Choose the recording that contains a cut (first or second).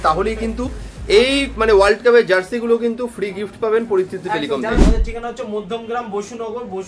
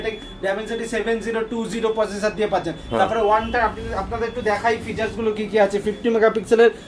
first